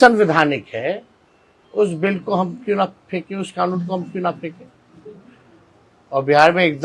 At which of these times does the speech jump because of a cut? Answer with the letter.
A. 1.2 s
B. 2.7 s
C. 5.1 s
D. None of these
D